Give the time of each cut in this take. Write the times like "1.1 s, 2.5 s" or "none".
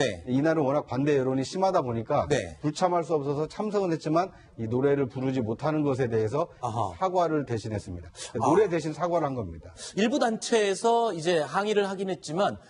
6.5 s